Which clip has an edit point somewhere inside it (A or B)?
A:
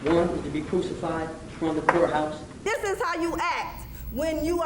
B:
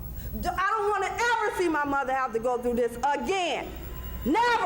A